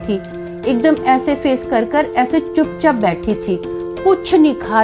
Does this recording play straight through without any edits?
yes; 0 cuts

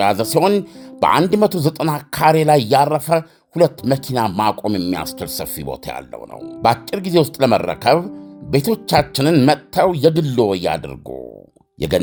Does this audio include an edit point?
no; 0 cuts

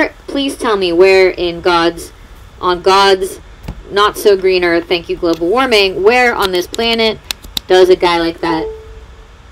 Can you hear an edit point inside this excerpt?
no; 0 cuts

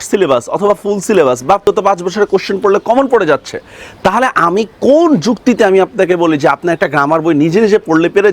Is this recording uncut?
no; 1 cut; at 1.6 s

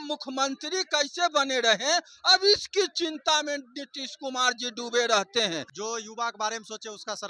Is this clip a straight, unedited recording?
no; 1 cut; at 5.7 s

